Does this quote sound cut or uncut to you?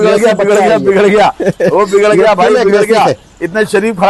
uncut